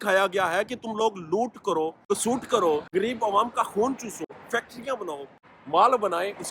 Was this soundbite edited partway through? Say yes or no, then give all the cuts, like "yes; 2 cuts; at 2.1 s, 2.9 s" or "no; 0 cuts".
yes; 4 cuts; at 2.0 s, 2.9 s, 4.3 s, 5.4 s